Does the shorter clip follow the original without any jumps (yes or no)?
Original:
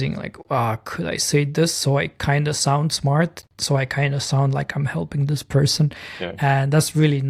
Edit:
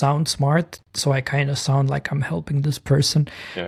yes